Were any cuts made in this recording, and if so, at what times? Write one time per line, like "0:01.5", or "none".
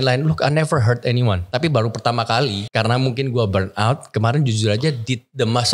0:01.4
0:02.6